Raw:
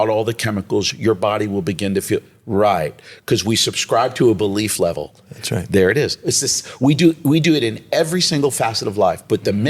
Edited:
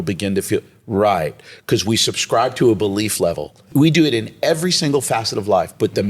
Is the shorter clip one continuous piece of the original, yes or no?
no